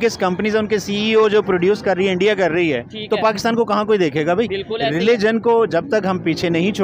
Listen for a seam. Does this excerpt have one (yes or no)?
no